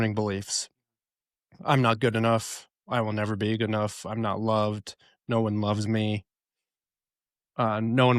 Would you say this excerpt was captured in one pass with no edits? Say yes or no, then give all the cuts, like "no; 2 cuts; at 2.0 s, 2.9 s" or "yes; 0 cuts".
yes; 0 cuts